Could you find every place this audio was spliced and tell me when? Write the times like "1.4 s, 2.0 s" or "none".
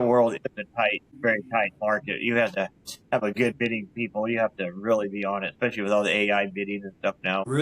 none